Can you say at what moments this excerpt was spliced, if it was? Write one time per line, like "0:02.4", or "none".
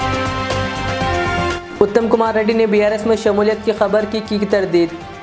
none